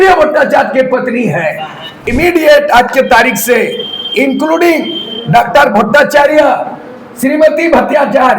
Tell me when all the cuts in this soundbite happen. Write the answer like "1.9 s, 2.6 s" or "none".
2.0 s